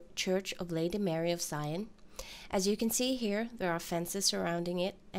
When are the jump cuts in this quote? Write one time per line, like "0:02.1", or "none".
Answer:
none